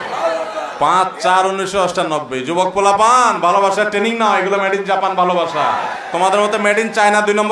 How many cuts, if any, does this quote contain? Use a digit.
1